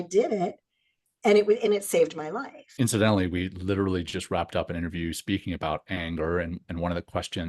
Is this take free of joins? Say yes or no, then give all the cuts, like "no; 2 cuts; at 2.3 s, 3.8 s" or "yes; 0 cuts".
no; 1 cut; at 2.7 s